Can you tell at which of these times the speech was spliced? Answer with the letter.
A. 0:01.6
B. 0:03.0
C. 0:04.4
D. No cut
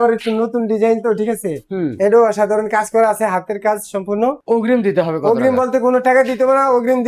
C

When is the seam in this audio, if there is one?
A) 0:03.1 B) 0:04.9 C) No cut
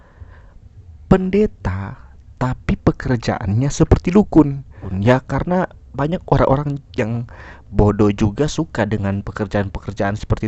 B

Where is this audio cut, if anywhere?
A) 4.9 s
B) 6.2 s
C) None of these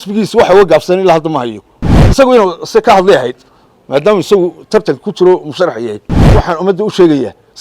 B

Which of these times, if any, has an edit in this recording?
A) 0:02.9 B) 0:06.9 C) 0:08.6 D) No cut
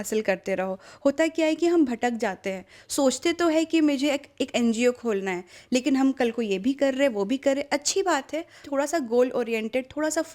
C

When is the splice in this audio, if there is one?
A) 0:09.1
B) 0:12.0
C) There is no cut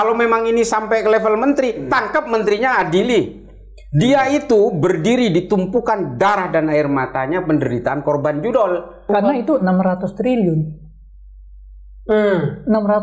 A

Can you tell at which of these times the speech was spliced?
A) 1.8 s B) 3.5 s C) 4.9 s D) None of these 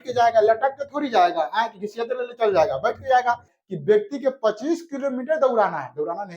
B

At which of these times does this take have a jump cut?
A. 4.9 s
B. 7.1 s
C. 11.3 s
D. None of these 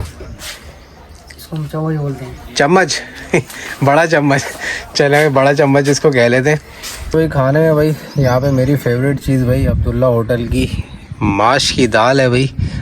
B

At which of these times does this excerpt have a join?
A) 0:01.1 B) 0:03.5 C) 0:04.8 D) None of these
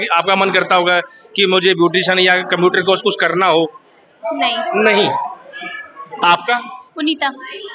D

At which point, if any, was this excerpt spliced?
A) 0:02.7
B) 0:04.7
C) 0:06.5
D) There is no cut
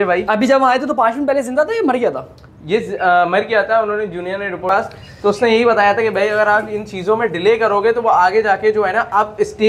B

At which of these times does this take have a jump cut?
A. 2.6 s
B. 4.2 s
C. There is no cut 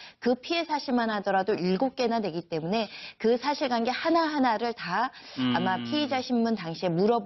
A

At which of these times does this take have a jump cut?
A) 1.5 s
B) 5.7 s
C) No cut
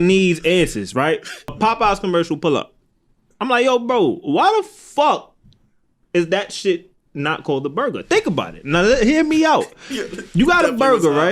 A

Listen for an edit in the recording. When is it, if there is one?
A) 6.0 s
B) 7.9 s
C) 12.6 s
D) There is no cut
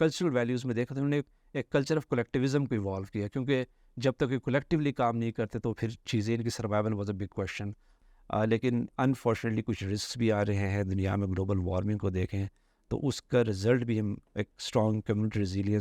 B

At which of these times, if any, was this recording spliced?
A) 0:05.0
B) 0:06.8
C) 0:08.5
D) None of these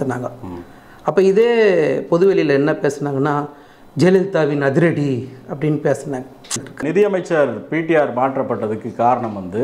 B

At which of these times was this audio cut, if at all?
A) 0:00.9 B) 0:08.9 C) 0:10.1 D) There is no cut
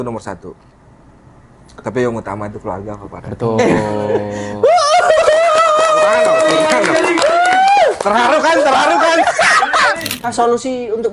C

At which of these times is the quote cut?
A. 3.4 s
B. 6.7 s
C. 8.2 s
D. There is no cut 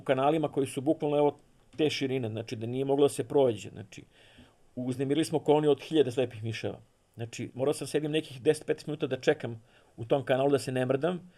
D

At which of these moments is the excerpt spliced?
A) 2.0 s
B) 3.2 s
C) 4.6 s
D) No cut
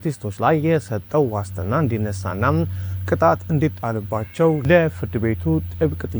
C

